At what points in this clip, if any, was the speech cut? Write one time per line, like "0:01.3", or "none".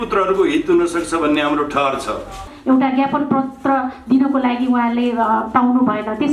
0:02.5

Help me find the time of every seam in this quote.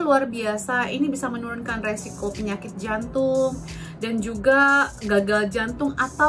none

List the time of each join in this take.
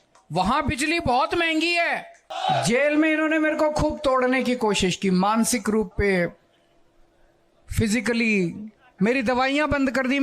0:02.3

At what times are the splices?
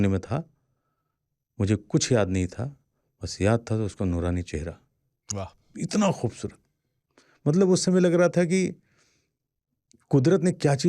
none

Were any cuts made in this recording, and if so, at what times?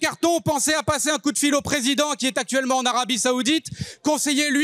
none

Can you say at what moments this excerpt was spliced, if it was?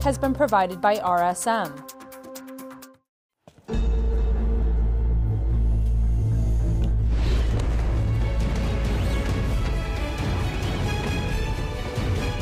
0:01.7
0:02.8

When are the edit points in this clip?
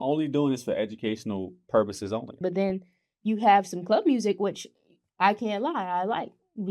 0:02.4

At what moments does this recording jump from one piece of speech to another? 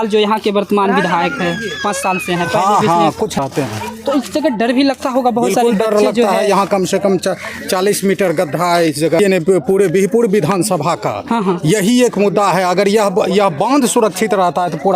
0:03.4
0:09.2

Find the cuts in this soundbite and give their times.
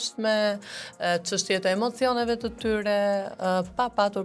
none

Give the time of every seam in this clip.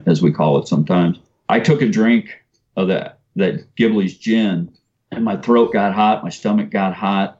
0:01.3

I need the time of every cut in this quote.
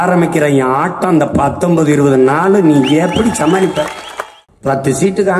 0:04.5

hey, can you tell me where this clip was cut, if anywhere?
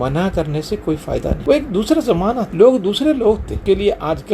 0:01.4
0:02.5
0:03.5

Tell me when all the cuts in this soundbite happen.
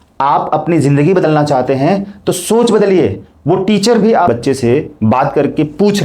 0:04.3

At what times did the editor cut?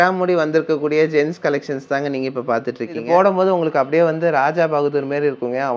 0:03.0

